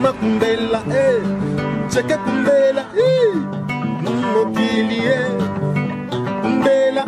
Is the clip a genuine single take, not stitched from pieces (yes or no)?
yes